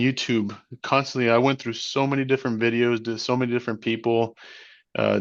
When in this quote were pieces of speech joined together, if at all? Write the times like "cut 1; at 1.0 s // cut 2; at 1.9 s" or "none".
none